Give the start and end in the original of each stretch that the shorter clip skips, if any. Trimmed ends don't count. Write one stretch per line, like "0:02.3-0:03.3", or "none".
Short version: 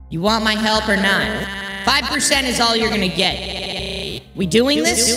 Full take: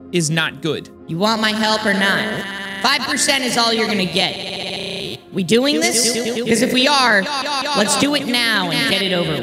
none